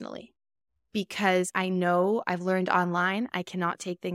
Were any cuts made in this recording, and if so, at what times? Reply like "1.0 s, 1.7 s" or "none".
1.5 s